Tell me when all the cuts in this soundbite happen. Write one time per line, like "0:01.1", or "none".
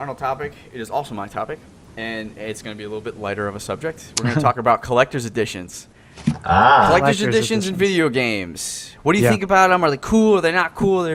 none